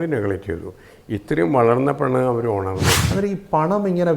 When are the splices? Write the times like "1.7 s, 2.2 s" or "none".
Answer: 3.0 s